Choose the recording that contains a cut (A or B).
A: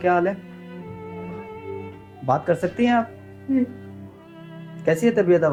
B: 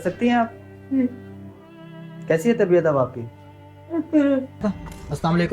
B